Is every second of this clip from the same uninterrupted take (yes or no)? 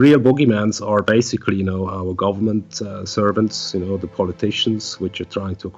yes